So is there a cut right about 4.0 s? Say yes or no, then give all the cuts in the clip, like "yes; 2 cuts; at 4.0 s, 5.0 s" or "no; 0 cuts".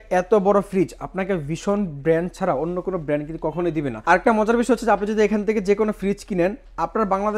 no; 0 cuts